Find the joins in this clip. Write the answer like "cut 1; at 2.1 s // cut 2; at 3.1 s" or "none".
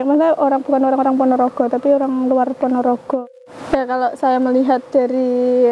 cut 1; at 3.2 s